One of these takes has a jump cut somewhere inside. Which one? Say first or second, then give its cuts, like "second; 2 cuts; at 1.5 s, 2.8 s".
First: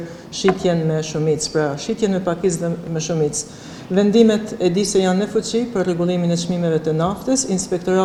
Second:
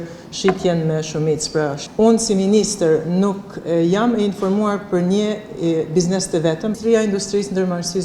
second; 2 cuts; at 1.9 s, 6.8 s